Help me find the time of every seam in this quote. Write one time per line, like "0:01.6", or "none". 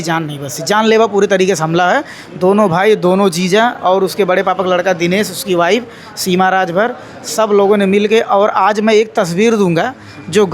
none